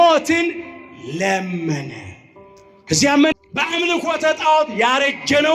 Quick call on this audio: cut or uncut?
cut